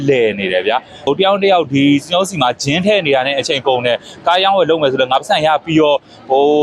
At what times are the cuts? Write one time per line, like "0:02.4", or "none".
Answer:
0:01.1